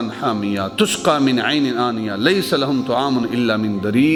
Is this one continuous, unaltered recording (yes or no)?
yes